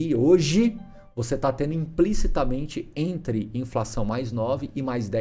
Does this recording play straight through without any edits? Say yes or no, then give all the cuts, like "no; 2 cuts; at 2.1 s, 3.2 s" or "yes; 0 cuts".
yes; 0 cuts